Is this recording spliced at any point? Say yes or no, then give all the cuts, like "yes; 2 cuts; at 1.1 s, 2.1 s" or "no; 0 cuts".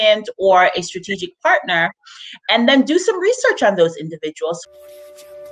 yes; 1 cut; at 4.6 s